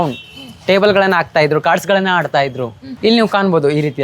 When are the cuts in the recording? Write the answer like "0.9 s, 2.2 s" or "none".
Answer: 2.8 s